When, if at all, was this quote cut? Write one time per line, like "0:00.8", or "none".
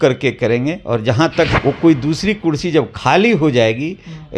0:01.5